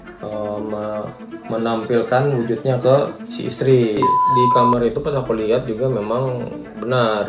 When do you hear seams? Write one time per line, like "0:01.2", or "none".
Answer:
0:04.2